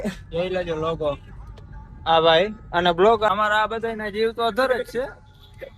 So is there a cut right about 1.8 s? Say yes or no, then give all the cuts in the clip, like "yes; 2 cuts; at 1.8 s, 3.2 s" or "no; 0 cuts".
no; 1 cut; at 3.3 s